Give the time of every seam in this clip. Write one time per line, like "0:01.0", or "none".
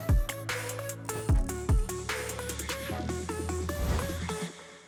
none